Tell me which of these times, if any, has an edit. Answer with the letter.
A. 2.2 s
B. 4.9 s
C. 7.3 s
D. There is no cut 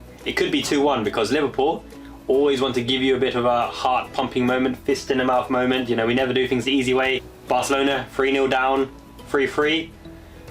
C